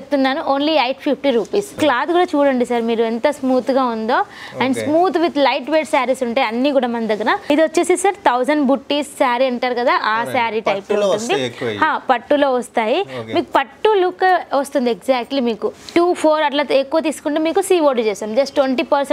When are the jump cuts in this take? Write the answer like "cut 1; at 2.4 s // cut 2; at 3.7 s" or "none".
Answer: cut 1; at 1.8 s // cut 2; at 7.5 s // cut 3; at 15.7 s